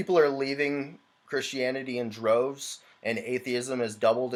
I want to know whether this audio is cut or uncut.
uncut